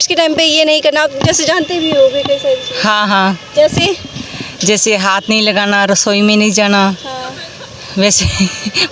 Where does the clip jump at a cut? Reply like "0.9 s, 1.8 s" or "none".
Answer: none